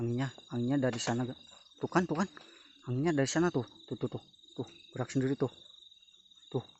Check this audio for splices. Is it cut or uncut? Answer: uncut